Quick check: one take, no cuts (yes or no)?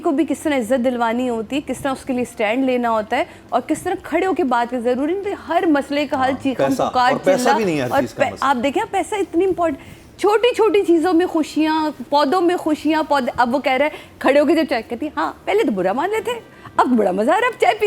yes